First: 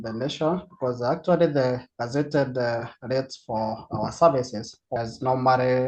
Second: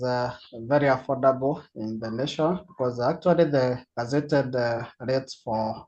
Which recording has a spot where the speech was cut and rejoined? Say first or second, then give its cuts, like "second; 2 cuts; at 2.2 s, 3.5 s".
first; 1 cut; at 4.9 s